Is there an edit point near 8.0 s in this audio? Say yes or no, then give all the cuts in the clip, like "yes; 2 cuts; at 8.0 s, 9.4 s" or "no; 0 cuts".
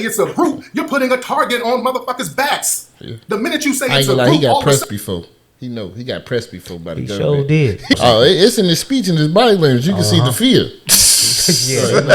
yes; 1 cut; at 8.0 s